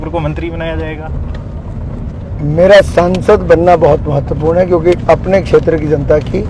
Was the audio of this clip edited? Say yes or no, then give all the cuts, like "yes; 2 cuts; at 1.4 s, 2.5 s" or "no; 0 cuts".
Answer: no; 0 cuts